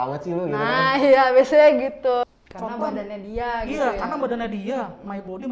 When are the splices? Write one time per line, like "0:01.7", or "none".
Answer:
0:02.2